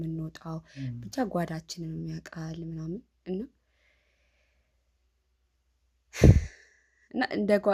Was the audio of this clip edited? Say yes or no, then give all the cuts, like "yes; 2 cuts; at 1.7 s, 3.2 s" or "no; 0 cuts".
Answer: no; 0 cuts